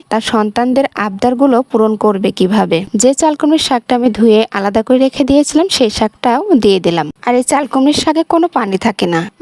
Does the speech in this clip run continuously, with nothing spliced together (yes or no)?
no